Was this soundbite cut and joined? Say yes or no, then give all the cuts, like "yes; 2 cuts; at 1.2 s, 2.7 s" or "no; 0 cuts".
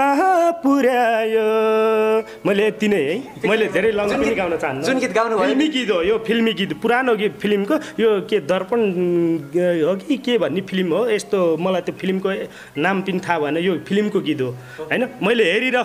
no; 0 cuts